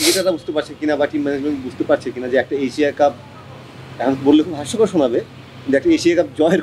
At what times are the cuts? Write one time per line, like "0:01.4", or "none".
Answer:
none